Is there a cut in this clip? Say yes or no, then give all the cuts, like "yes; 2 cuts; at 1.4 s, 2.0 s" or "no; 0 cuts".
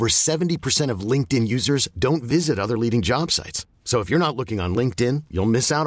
no; 0 cuts